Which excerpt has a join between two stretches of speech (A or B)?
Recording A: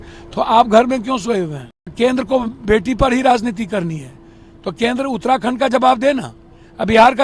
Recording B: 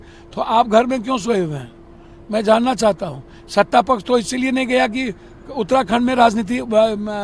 A